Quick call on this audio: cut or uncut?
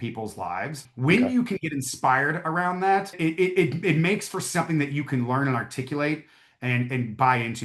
cut